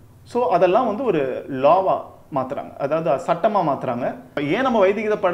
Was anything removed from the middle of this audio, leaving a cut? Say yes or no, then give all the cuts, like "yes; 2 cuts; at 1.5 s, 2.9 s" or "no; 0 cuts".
yes; 1 cut; at 4.3 s